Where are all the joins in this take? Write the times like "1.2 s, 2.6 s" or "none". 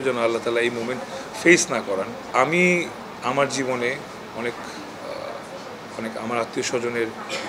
none

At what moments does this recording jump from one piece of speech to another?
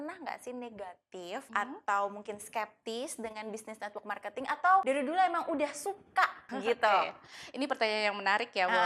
1.5 s, 4.8 s, 6.5 s

